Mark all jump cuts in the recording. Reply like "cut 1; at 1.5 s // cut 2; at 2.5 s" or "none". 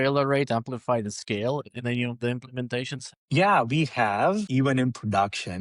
cut 1; at 3.0 s // cut 2; at 4.5 s